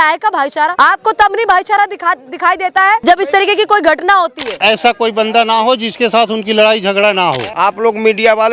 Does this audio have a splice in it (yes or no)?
yes